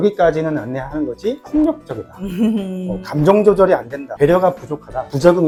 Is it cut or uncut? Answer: uncut